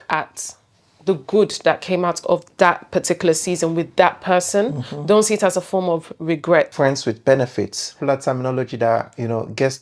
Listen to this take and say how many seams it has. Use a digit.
2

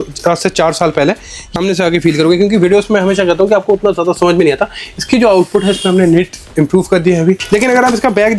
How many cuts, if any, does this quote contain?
2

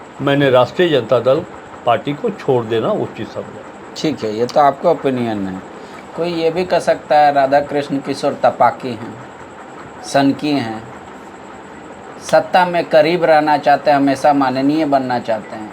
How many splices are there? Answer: 0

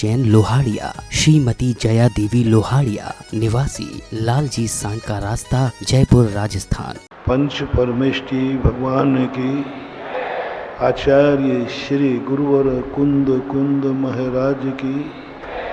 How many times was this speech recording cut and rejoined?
1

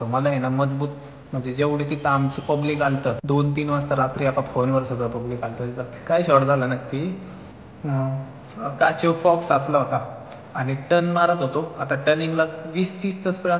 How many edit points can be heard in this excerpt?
2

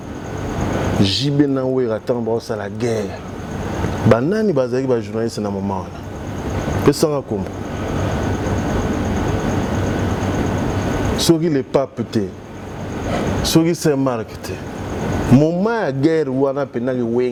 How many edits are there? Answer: 0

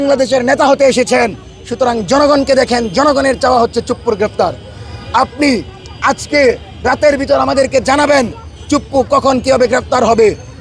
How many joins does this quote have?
0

